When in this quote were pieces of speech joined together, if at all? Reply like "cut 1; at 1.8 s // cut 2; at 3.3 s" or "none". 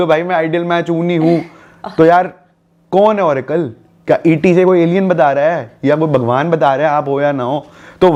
none